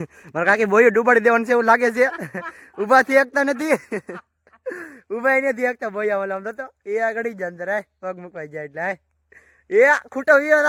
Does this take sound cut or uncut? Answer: uncut